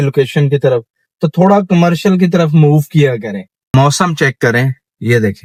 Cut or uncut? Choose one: uncut